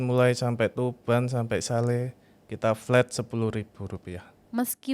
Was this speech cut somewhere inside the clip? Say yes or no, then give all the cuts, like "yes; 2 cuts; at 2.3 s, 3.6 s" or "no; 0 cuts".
no; 0 cuts